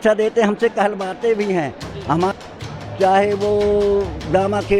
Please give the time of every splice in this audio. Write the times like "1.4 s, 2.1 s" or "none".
2.3 s